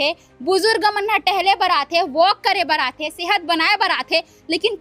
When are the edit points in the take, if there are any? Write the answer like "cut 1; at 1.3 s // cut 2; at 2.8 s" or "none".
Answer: none